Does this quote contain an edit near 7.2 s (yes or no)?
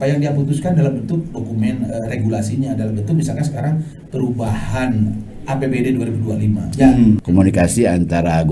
yes